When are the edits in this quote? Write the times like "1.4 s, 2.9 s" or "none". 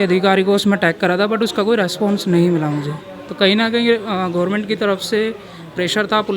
none